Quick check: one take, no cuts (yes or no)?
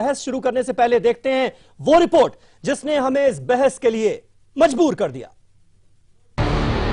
no